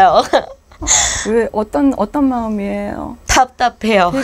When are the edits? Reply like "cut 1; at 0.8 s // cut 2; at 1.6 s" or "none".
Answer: cut 1; at 3.1 s